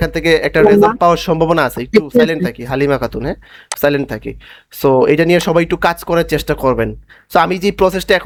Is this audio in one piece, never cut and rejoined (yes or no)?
yes